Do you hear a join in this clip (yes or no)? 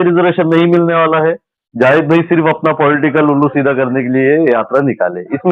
no